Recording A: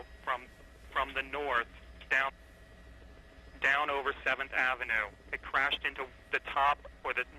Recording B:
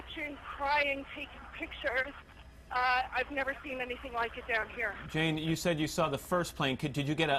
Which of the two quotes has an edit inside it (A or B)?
A